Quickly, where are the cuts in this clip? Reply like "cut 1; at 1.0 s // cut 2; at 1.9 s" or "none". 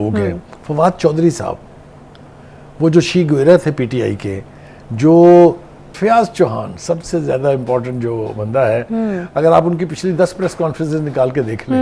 cut 1; at 5.9 s